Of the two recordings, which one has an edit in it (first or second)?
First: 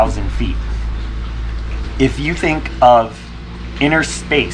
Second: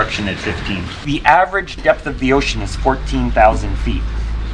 second